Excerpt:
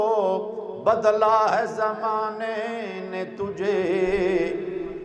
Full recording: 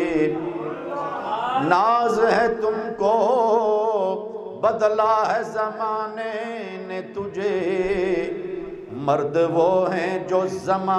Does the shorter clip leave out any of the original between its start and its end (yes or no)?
no